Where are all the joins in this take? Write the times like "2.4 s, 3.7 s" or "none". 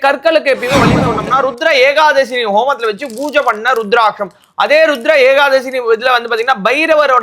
1.1 s